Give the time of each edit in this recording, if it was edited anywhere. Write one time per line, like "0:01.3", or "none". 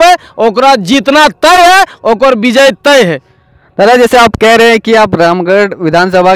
none